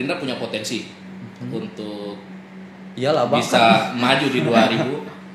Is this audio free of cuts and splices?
yes; 0 cuts

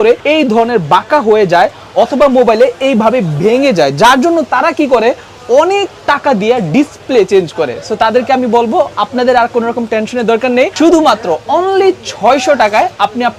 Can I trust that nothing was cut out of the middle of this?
yes; 0 cuts

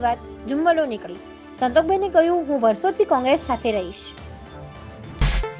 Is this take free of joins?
yes; 0 cuts

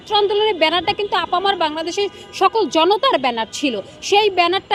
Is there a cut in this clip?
no; 0 cuts

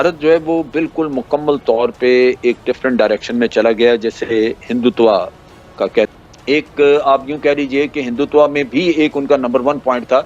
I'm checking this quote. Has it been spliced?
yes; 1 cut; at 6.1 s

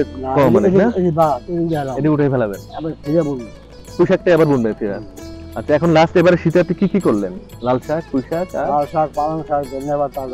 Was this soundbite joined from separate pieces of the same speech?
no; 0 cuts

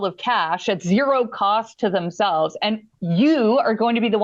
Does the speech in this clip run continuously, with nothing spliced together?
yes; 0 cuts

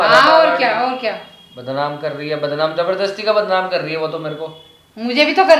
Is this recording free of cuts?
yes; 0 cuts

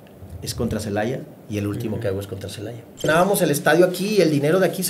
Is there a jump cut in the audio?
yes; 1 cut; at 3.1 s

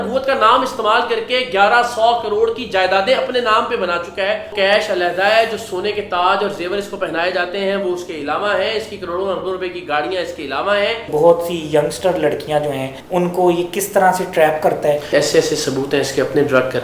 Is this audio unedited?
no; 4 cuts; at 4.5 s, 11.1 s, 12.9 s, 15.1 s

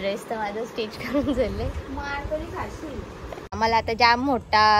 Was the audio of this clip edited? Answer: yes; 1 cut; at 3.6 s

